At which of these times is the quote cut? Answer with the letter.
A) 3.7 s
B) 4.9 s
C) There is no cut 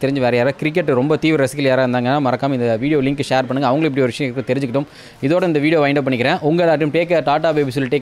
C